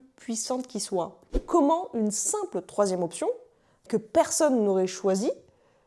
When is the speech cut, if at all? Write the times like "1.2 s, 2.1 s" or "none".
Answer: 1.2 s

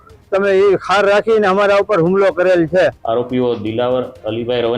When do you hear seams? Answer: 3.0 s

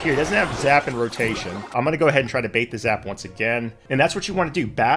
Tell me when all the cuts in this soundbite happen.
1.7 s, 3.8 s

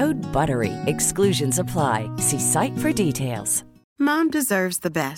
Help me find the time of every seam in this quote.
none

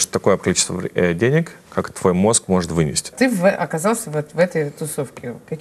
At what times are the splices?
3.1 s

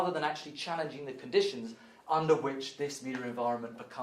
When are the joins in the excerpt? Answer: none

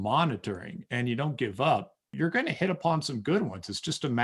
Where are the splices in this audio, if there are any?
2.1 s

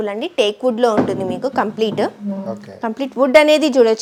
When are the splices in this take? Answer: none

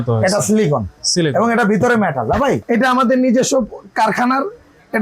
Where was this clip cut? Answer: 2.6 s

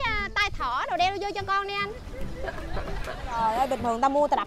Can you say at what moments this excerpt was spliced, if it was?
3.4 s

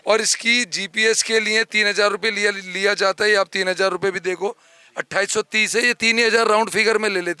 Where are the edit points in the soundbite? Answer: none

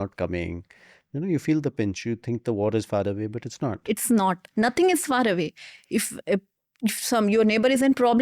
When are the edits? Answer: none

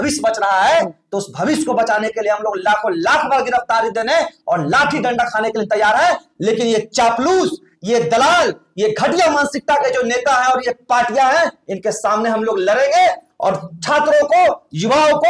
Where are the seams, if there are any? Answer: none

